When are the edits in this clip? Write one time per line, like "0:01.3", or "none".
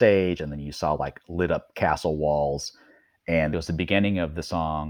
0:03.5